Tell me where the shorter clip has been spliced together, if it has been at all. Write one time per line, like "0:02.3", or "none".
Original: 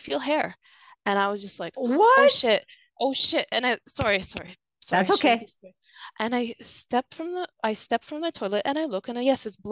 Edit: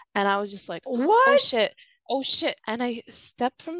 0:02.6